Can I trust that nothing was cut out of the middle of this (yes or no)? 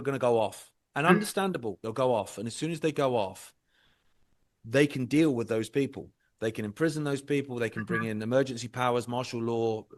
yes